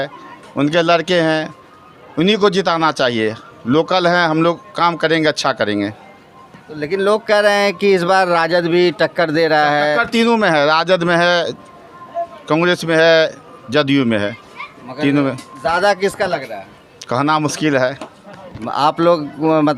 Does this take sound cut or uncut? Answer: uncut